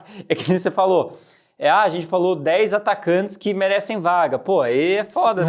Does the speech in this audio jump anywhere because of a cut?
no; 0 cuts

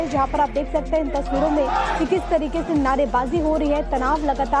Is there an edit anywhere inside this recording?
yes; 1 cut; at 2.4 s

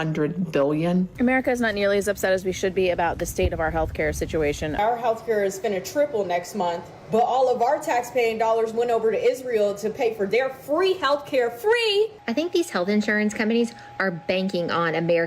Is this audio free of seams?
no; 4 cuts; at 1.2 s, 4.8 s, 6.9 s, 12.2 s

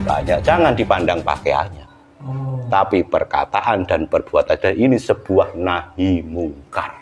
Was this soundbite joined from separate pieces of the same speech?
no; 0 cuts

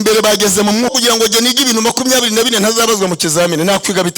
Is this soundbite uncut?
no; 1 cut; at 1.0 s

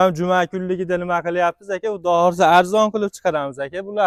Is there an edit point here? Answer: no; 0 cuts

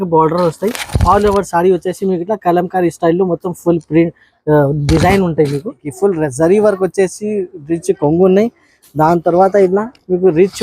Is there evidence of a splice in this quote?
yes; 1 cut; at 5.9 s

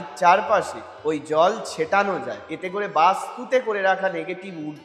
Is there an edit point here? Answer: yes; 1 cut; at 2.4 s

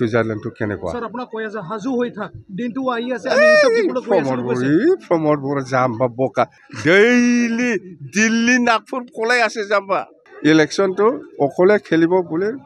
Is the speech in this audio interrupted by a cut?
yes; 1 cut; at 10.2 s

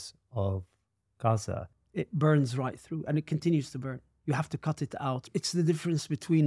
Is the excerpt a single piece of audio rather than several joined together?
no; 2 cuts; at 1.8 s, 5.3 s

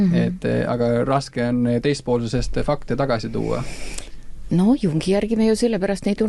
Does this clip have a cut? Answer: no; 0 cuts

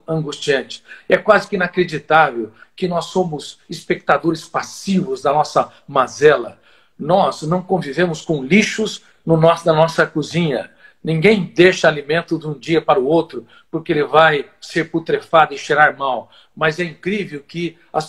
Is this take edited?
no; 0 cuts

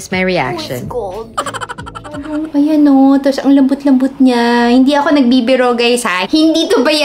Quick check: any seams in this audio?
yes; 1 cut; at 2.3 s

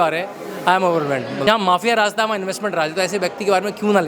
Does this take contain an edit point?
yes; 1 cut; at 1.4 s

